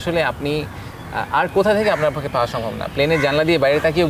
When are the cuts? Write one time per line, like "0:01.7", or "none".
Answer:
none